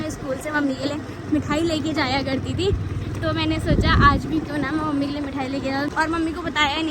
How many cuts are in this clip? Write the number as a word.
one